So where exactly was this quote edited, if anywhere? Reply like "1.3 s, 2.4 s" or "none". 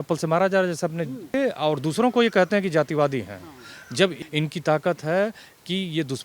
1.3 s, 4.1 s